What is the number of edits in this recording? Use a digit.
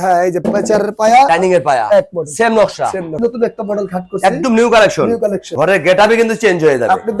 2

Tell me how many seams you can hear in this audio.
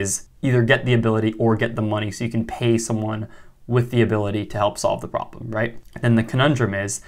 0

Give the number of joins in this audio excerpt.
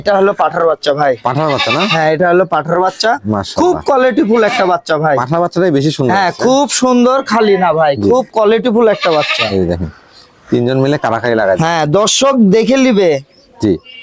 0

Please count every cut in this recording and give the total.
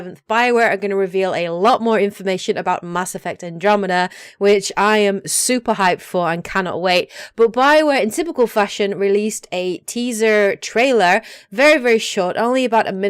1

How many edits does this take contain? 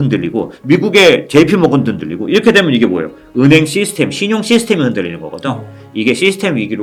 0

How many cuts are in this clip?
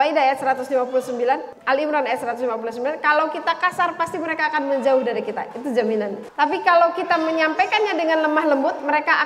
2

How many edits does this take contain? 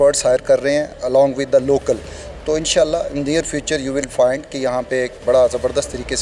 0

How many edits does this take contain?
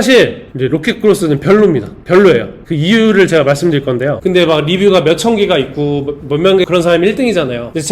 1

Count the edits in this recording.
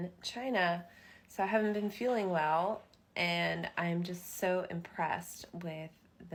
0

